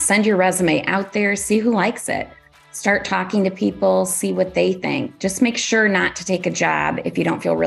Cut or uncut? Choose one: uncut